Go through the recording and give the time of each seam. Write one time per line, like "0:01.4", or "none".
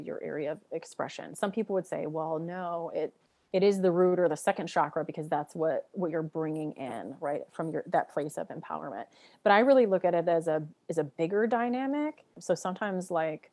0:12.3